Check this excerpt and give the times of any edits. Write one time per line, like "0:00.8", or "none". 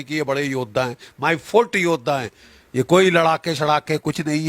0:02.4